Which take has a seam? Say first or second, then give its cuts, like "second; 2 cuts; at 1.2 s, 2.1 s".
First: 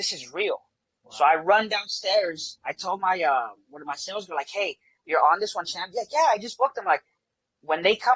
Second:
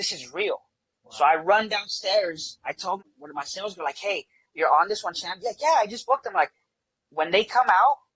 second; 1 cut; at 3.0 s